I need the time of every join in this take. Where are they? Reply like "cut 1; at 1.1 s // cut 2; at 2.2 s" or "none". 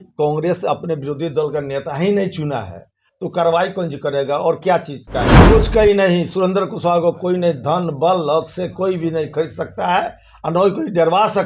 cut 1; at 5.3 s